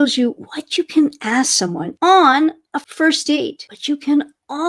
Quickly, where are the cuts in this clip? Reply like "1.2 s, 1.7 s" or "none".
1.8 s, 3.1 s